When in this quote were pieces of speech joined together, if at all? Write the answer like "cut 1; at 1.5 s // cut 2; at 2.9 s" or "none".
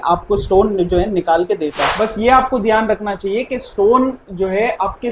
cut 1; at 1.8 s